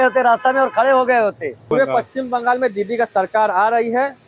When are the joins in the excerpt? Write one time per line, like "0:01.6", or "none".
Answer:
0:01.7